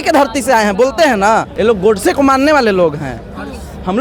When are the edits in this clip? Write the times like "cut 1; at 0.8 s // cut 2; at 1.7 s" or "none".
cut 1; at 1.5 s